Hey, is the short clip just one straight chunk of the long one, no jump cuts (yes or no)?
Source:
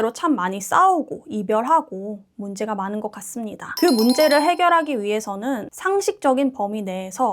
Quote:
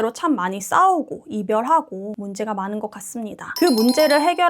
no